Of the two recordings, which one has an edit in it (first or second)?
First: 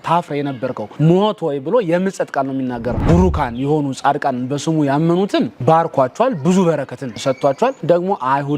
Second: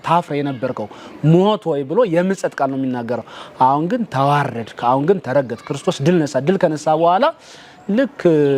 first